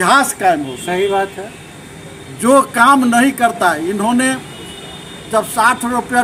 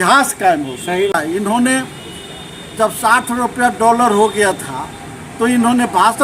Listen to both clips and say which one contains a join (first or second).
second